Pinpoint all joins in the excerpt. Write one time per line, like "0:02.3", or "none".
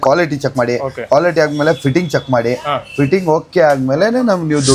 none

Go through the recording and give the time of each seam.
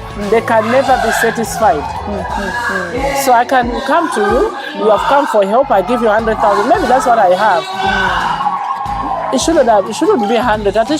none

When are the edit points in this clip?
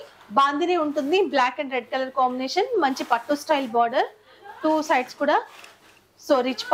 none

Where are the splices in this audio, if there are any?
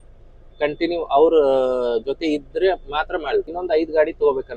0:03.6

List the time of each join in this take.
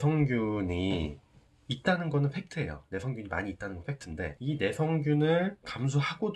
none

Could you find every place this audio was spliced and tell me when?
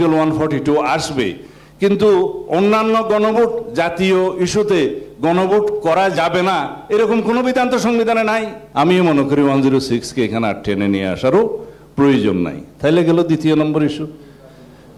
0:08.6

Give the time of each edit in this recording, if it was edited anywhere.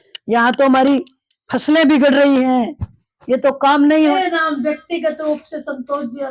0:04.1

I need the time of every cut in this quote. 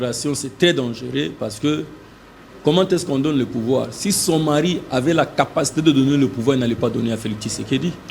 none

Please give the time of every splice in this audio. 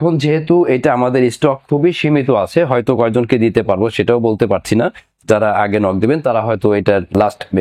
none

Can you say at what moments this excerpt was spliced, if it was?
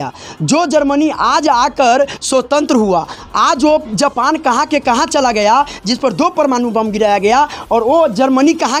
none

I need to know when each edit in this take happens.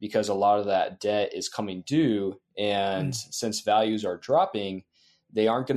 none

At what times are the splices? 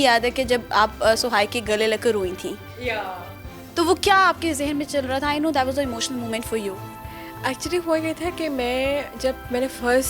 none

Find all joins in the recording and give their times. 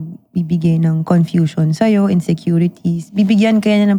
none

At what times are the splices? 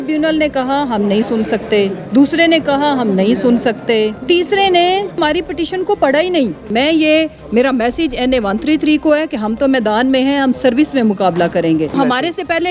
0:02.0
0:04.2
0:05.2
0:06.6
0:11.9

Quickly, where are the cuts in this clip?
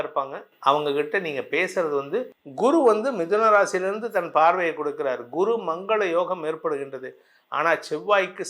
0:02.4

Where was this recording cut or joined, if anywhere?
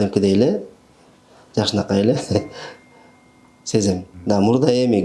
0:04.1

